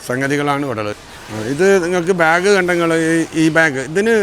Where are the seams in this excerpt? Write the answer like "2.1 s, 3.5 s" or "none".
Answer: 1.0 s